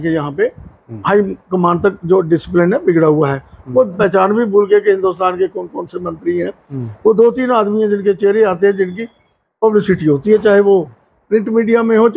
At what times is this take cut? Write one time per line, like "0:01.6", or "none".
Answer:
0:03.9